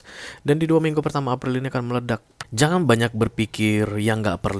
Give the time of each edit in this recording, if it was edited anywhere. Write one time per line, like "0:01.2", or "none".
0:02.4